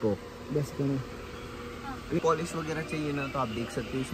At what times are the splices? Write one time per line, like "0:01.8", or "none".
0:02.2